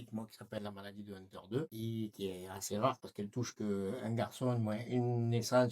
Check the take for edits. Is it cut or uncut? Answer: cut